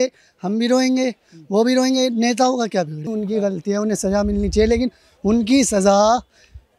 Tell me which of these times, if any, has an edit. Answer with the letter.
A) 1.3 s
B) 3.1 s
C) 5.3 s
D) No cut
B